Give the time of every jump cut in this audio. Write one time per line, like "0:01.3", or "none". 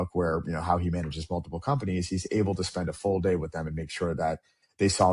none